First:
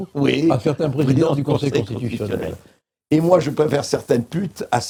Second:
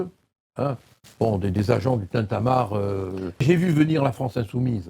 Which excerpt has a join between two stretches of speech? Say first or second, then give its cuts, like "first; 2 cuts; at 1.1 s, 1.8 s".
second; 1 cut; at 3.4 s